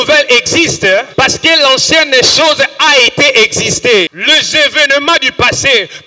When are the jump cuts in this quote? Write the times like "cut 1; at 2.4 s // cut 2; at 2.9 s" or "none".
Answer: cut 1; at 1.1 s // cut 2; at 4.1 s

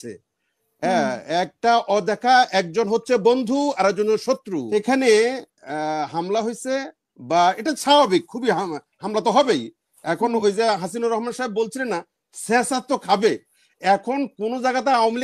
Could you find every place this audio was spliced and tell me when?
cut 1; at 4.7 s

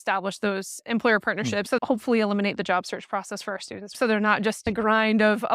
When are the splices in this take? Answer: cut 1; at 1.7 s // cut 2; at 4.0 s

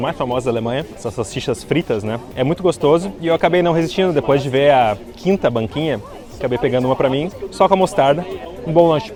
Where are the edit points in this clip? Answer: none

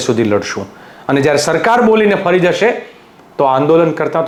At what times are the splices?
none

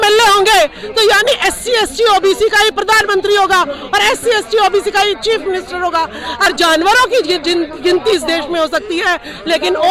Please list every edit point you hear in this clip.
cut 1; at 6.4 s

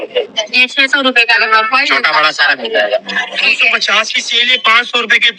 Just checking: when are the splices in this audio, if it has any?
cut 1; at 3.2 s

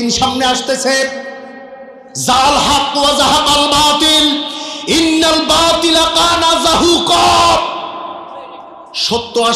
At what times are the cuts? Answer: none

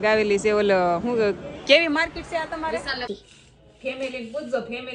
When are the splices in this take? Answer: cut 1; at 3.1 s

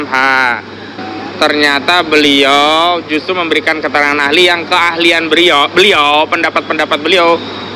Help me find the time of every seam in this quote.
cut 1; at 1.0 s

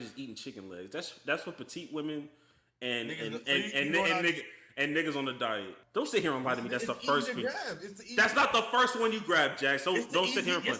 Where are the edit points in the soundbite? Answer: cut 1; at 5.8 s

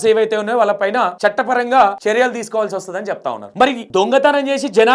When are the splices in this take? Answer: cut 1; at 1.1 s // cut 2; at 2.0 s // cut 3; at 3.5 s

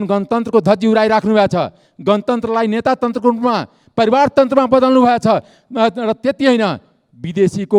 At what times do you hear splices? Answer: none

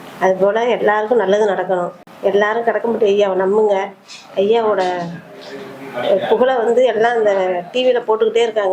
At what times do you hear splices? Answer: cut 1; at 2.0 s

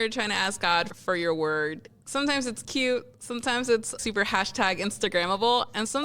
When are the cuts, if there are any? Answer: cut 1; at 0.9 s

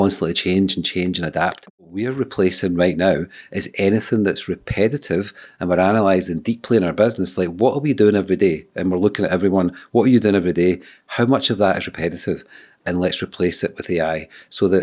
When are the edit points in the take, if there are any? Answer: cut 1; at 1.6 s

